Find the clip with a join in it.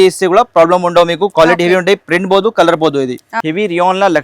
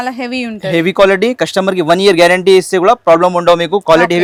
first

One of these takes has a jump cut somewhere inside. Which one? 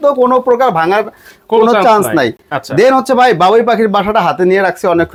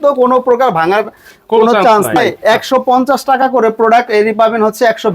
second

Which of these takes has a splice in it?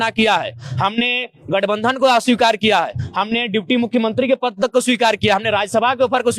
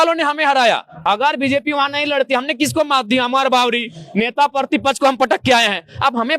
second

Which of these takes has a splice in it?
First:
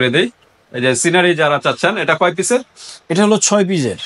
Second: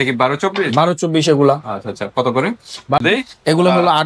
second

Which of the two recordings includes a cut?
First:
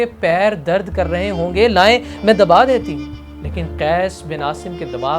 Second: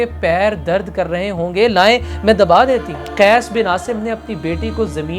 second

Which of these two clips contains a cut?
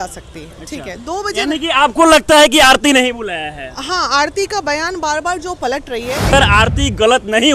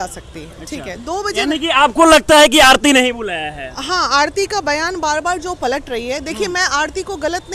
first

